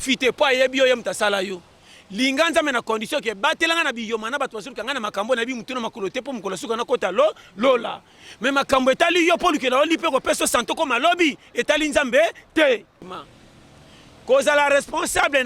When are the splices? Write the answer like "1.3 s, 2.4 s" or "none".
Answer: 13.2 s